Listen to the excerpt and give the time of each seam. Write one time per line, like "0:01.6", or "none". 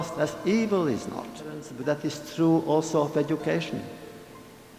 0:01.7